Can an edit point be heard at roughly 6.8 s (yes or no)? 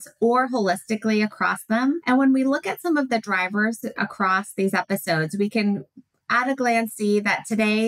no